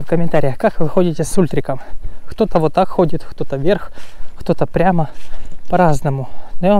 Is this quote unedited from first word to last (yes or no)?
yes